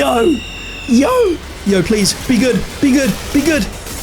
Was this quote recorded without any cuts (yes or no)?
no